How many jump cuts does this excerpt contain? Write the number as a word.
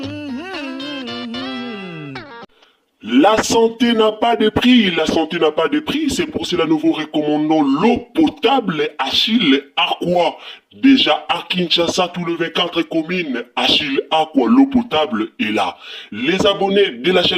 one